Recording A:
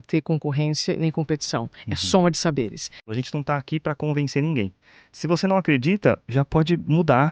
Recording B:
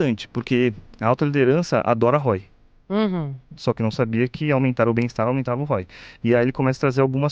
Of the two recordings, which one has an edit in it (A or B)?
A